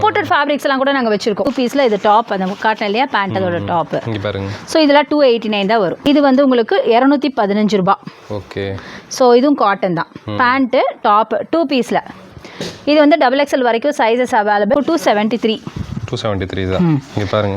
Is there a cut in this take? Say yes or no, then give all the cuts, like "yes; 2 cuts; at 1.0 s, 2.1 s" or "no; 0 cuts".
yes; 3 cuts; at 1.5 s, 6.0 s, 14.7 s